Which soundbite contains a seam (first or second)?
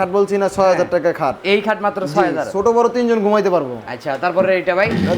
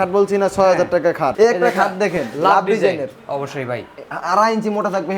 second